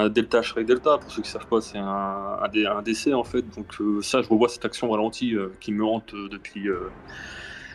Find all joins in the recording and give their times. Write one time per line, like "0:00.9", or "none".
none